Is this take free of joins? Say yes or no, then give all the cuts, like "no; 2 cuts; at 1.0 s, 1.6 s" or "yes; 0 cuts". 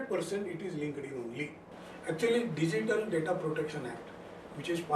no; 1 cut; at 1.8 s